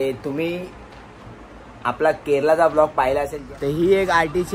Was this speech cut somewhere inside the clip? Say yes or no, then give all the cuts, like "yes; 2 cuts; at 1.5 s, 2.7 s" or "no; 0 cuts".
yes; 1 cut; at 3.4 s